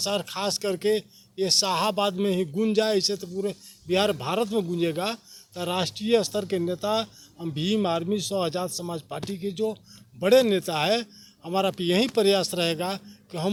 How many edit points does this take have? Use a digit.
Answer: 0